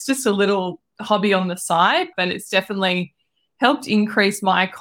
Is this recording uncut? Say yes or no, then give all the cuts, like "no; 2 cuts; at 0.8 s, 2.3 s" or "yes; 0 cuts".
no; 1 cut; at 2.1 s